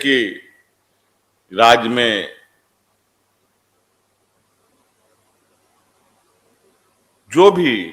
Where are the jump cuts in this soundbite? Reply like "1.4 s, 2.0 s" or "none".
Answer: none